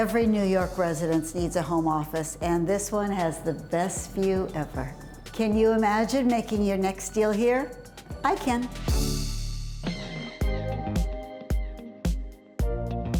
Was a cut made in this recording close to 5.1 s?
no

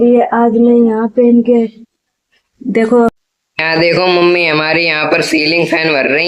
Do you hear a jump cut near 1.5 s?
no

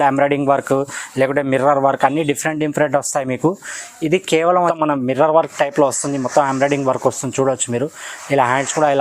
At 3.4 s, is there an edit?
no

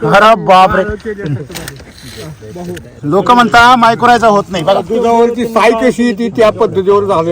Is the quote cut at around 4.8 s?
yes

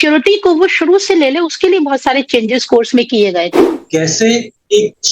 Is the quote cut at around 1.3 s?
no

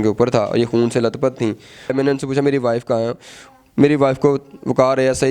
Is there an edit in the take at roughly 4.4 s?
no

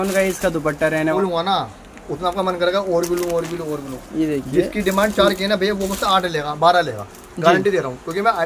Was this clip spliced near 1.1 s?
yes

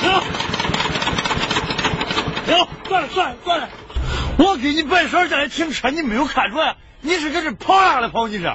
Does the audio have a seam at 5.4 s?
no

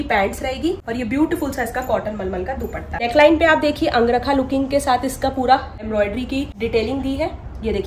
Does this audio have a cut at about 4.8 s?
no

